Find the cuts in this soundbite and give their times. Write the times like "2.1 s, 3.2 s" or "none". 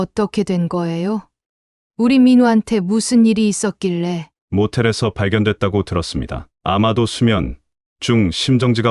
4.3 s